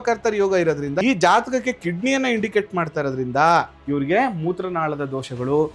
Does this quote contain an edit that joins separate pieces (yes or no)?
yes